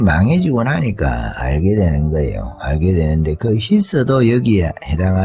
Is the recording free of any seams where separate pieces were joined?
yes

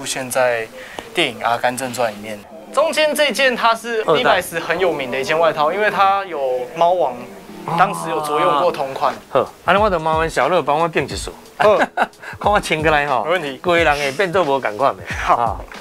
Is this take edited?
yes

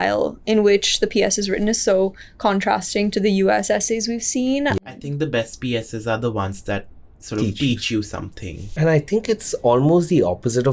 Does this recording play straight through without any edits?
no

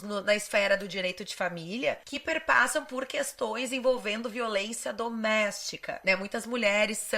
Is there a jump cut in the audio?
yes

